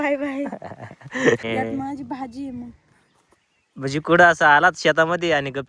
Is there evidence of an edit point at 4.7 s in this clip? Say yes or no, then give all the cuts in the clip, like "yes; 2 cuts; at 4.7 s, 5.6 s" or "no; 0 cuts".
no; 1 cut; at 1.4 s